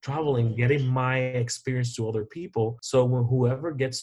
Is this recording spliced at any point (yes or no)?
yes